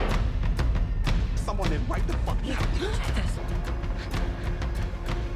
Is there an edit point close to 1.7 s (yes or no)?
no